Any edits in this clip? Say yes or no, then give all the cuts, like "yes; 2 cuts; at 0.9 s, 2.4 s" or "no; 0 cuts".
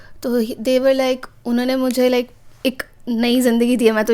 no; 0 cuts